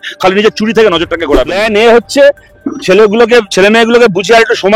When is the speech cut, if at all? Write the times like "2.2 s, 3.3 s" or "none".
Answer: 1.6 s